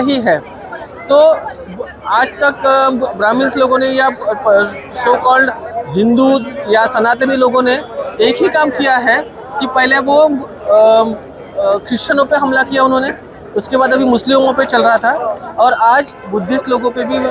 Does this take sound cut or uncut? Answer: uncut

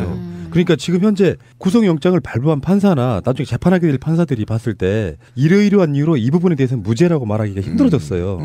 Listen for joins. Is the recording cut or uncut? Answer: uncut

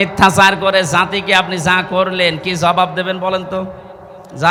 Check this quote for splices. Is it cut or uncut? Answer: uncut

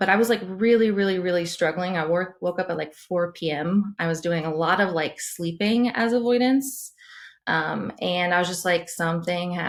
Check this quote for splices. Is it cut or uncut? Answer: uncut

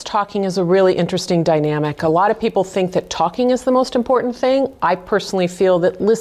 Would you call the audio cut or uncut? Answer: uncut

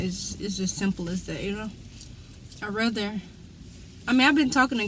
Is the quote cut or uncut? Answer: uncut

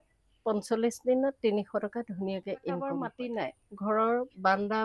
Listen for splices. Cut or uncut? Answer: cut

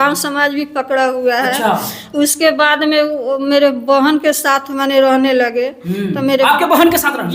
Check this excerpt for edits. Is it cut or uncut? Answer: uncut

